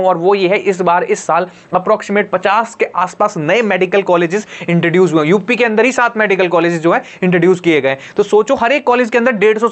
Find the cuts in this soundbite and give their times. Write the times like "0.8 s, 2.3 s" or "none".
none